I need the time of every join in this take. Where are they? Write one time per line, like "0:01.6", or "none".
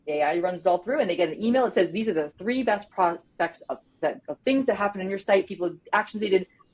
none